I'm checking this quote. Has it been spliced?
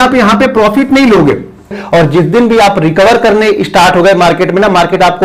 yes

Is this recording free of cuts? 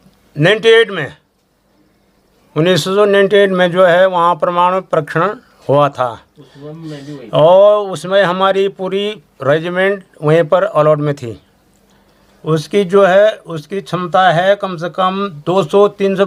yes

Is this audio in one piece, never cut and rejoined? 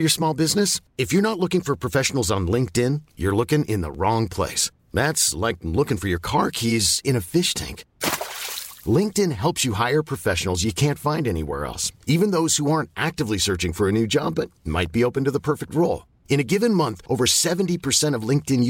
yes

